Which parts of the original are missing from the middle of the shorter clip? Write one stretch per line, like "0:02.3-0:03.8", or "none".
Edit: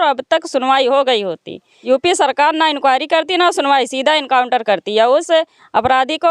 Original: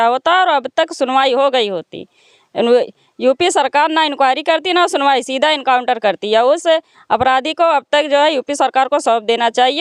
0:02.1-0:03.0